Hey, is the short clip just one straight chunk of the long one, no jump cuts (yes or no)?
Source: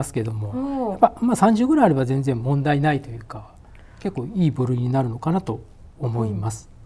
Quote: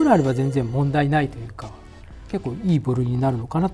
yes